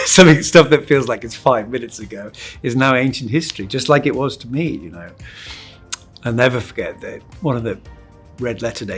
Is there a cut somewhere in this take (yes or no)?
no